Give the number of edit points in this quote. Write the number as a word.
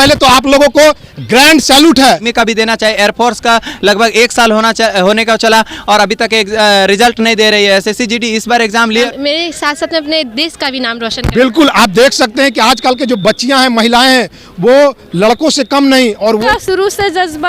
three